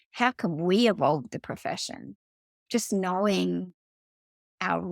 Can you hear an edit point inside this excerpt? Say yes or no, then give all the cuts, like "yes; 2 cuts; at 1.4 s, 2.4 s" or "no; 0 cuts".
yes; 1 cut; at 2.6 s